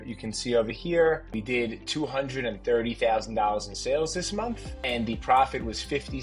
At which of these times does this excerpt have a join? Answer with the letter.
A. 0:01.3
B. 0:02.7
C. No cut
A